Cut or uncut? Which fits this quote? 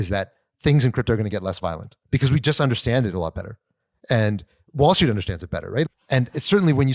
cut